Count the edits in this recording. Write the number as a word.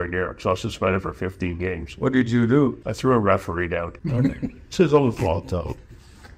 two